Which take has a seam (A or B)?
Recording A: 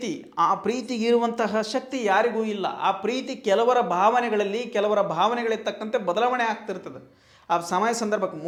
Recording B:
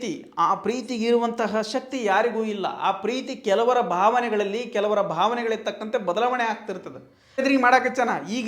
B